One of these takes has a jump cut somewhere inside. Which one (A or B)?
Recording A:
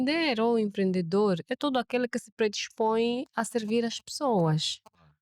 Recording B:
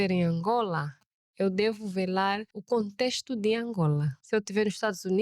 B